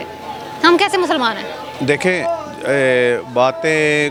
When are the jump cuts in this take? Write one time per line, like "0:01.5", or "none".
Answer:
none